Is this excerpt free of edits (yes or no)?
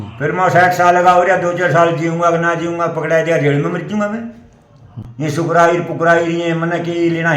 no